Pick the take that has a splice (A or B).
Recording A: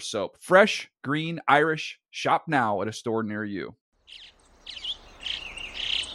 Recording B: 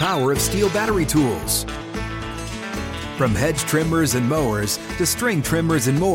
A